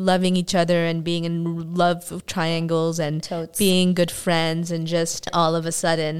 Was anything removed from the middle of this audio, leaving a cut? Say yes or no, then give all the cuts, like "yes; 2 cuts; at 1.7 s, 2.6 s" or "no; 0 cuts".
no; 0 cuts